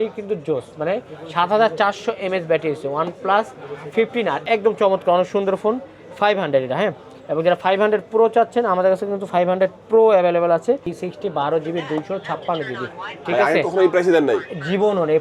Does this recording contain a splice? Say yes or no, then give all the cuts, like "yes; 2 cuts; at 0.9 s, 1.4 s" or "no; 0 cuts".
yes; 2 cuts; at 4.4 s, 10.9 s